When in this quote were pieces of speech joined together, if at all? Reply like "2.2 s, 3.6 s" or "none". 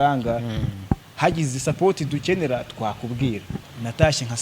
3.5 s

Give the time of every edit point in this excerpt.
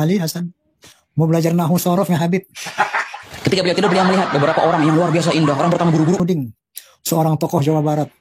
6.2 s

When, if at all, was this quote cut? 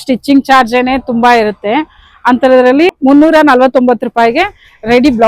3.0 s

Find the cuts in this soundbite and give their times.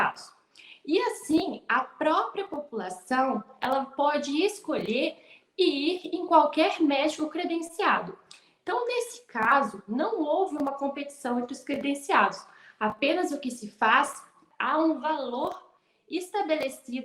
14.4 s

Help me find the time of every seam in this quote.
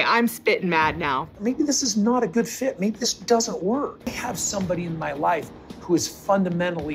4.0 s

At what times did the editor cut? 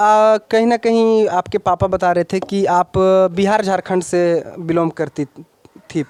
none

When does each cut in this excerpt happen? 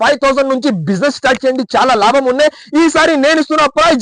none

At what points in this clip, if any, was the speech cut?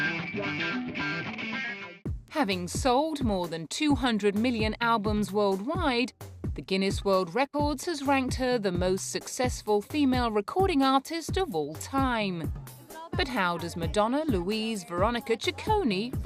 8.3 s

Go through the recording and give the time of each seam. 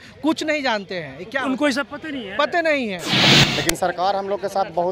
3.3 s

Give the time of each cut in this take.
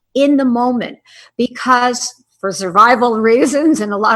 none

